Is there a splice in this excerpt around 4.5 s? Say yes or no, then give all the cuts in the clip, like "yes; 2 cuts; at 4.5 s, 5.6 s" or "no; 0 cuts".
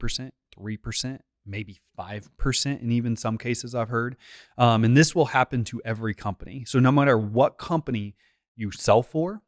no; 1 cut; at 8.4 s